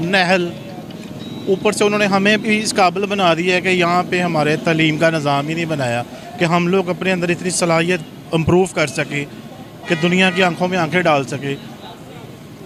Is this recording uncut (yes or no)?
yes